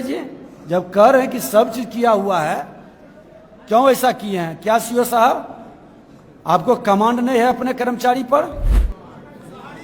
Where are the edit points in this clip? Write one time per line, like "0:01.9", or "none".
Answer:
0:08.7

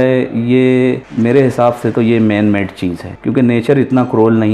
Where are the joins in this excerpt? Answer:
0:01.1
0:03.1

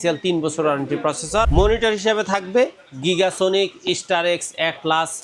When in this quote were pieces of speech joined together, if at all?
0:01.5

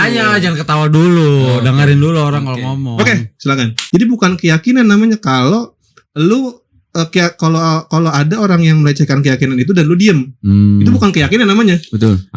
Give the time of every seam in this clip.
0:03.8

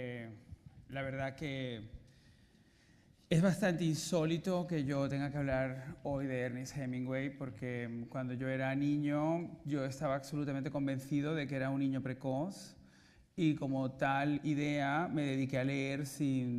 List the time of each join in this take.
0:13.9

